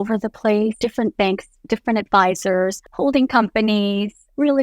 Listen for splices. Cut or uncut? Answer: cut